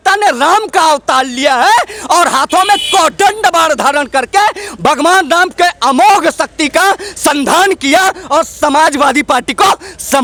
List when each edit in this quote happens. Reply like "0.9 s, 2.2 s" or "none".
none